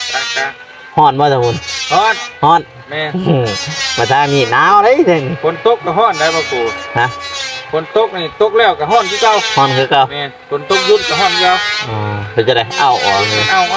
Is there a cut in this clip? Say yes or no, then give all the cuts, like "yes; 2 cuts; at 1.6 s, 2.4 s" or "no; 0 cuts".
no; 0 cuts